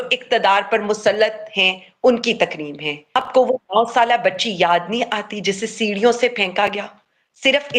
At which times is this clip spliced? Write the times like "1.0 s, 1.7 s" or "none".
3.1 s